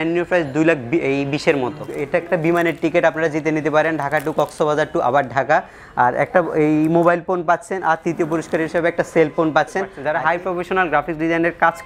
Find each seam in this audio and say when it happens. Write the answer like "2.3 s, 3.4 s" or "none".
1.9 s, 10.0 s